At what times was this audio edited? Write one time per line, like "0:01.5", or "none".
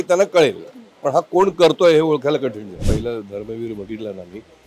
0:02.8